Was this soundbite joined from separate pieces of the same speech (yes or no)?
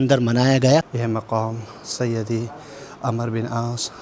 yes